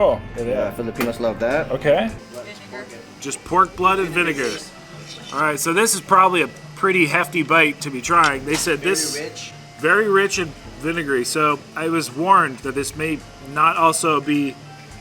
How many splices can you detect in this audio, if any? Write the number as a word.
one